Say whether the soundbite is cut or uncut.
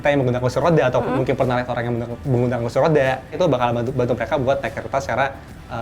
cut